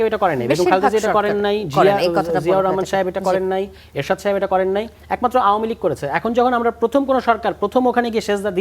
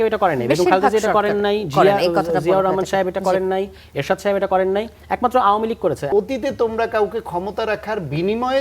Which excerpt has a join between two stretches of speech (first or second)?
second